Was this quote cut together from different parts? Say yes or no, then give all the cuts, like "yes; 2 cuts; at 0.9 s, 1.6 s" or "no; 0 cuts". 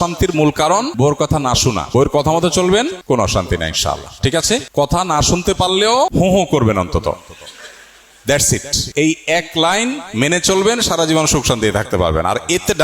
yes; 6 cuts; at 0.9 s, 1.9 s, 3.0 s, 4.7 s, 6.1 s, 8.8 s